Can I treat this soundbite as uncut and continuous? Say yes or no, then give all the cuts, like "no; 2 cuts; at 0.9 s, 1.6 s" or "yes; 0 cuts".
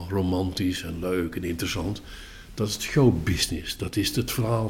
yes; 0 cuts